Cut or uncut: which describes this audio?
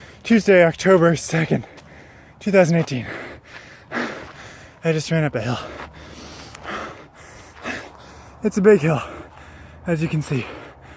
uncut